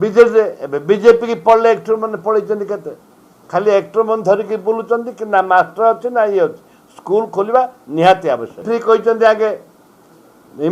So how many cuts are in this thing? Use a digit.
0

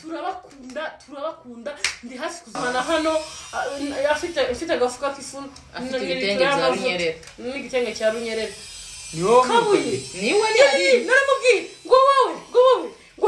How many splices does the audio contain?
1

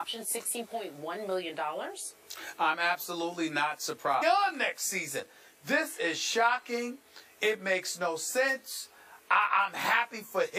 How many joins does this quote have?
0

